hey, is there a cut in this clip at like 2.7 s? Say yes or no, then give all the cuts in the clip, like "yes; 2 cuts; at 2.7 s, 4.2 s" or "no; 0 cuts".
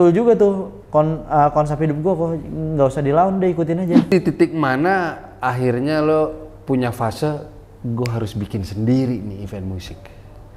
no; 1 cut; at 4.1 s